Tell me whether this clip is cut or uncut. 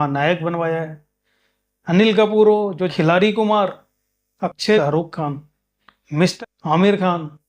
cut